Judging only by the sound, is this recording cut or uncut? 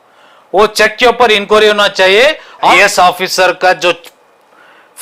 cut